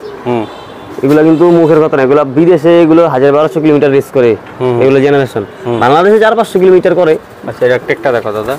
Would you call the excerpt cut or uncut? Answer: uncut